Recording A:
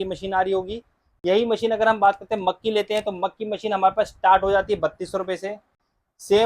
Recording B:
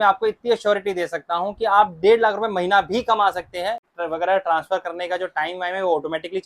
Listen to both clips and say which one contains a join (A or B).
B